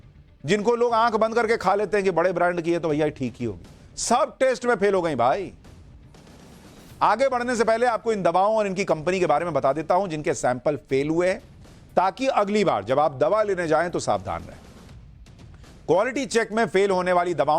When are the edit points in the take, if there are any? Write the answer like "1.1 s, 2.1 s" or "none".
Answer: 1.8 s